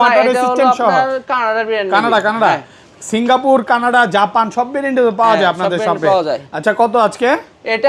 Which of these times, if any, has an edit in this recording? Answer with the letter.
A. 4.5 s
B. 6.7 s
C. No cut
C